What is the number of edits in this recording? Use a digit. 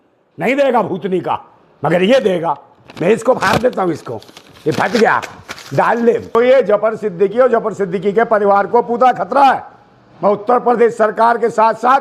1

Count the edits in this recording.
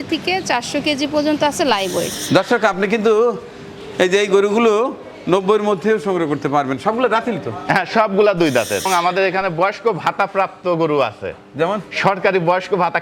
2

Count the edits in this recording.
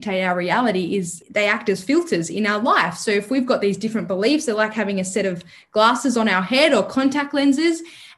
1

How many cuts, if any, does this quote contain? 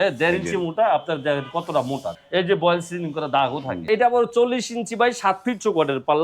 2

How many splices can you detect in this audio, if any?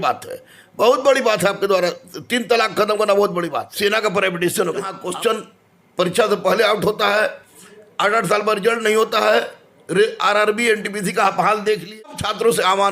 3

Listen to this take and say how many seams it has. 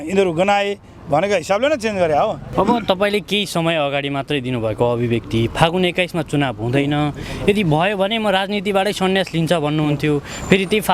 1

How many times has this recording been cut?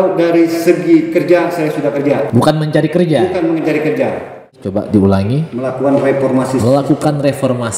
2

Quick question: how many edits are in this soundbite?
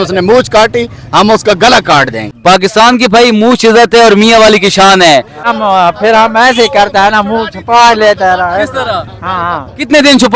2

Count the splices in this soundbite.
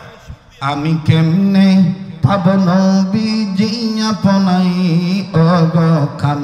0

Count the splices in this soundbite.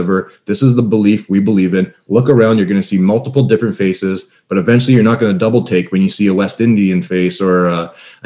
0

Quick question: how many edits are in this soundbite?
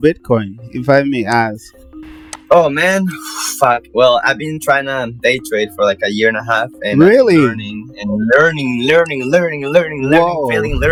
0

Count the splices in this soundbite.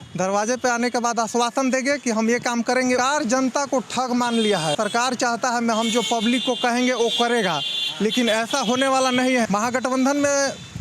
3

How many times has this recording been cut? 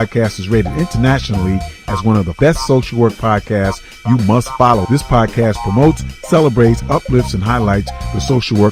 1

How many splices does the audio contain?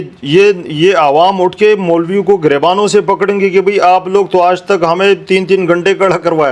0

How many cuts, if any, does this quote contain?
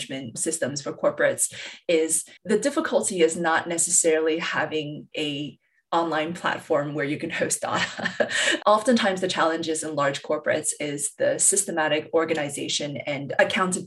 1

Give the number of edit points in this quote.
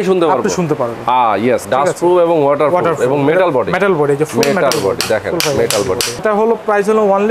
2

